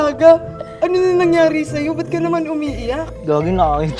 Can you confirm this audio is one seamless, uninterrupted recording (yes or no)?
yes